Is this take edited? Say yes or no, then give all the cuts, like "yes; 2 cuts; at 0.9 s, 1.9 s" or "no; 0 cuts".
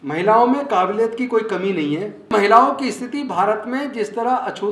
yes; 1 cut; at 2.3 s